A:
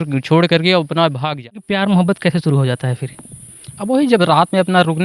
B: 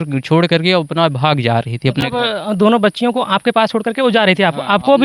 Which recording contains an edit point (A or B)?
A